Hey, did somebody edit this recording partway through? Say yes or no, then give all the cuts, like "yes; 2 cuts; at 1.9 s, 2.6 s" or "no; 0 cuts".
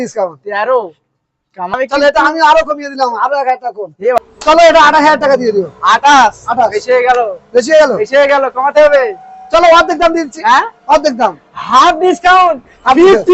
yes; 2 cuts; at 1.7 s, 4.2 s